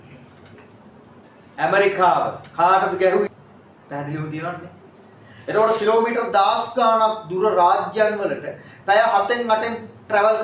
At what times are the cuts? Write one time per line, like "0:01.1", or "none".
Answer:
0:03.3